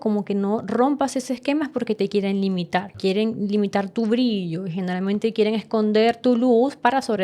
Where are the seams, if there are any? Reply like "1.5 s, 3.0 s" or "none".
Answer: 3.0 s